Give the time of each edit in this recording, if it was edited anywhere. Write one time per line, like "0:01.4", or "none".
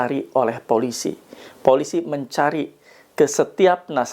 none